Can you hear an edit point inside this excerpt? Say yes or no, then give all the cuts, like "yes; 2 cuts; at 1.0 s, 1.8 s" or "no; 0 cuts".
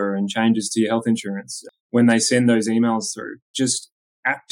yes; 2 cuts; at 1.7 s, 3.5 s